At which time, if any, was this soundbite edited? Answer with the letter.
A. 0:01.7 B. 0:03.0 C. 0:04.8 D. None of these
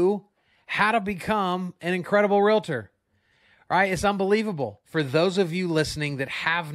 C